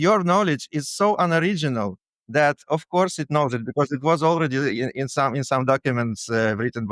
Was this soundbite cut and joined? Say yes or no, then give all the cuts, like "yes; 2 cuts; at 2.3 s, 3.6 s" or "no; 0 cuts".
no; 0 cuts